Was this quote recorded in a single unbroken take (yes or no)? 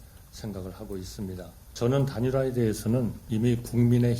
no